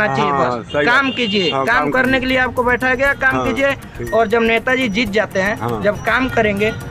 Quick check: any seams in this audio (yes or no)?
no